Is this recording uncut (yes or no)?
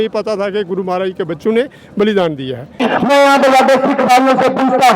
no